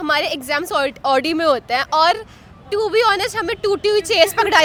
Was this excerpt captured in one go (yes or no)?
yes